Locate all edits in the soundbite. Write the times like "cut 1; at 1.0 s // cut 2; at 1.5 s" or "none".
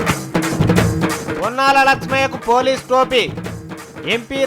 cut 1; at 1.1 s